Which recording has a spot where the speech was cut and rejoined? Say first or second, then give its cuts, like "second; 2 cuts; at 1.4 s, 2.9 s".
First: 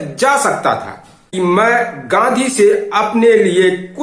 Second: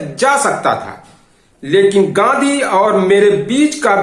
first; 1 cut; at 1.3 s